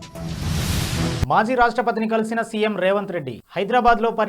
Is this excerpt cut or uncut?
cut